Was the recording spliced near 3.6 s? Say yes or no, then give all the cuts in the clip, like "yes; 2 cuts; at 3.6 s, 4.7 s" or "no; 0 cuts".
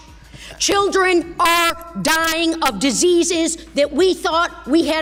no; 0 cuts